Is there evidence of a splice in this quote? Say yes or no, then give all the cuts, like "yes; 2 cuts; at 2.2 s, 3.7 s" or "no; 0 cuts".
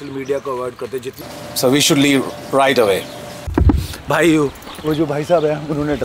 yes; 2 cuts; at 1.1 s, 3.4 s